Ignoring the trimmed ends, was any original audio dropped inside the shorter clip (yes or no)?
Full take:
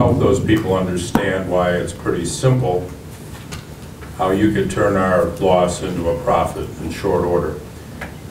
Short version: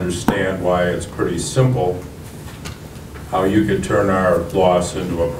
no